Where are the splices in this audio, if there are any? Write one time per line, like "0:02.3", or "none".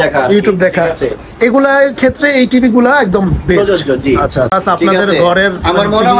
0:04.5